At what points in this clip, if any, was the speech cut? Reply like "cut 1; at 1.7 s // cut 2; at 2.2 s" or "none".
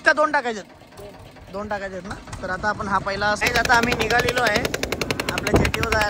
cut 1; at 3.4 s